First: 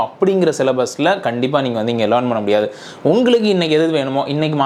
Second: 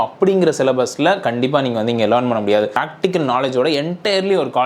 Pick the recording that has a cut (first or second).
second